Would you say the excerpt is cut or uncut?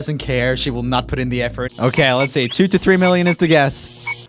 cut